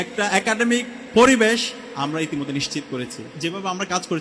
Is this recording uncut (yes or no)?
no